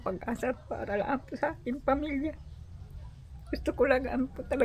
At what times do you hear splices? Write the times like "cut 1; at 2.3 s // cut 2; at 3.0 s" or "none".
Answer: none

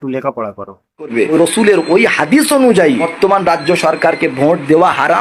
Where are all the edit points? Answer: cut 1; at 1.1 s

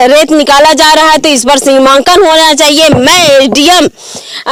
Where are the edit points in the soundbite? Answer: none

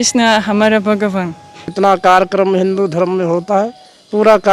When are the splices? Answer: cut 1; at 1.7 s

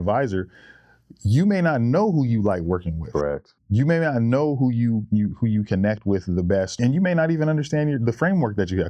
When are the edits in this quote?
cut 1; at 3.5 s // cut 2; at 6.8 s

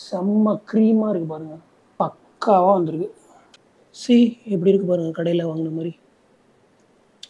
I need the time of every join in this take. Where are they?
none

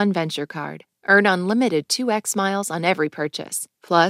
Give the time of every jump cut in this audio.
none

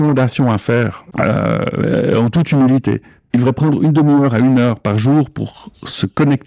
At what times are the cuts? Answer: cut 1; at 1.0 s // cut 2; at 3.1 s

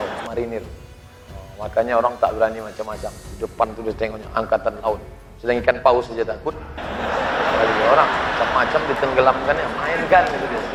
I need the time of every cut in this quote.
none

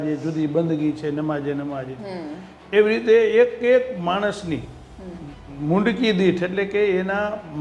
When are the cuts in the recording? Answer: none

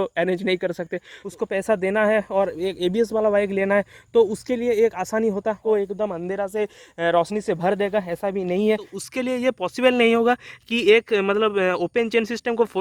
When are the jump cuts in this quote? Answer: cut 1; at 1.2 s // cut 2; at 5.6 s // cut 3; at 8.9 s

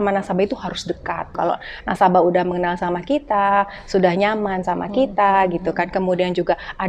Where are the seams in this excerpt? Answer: cut 1; at 1.3 s

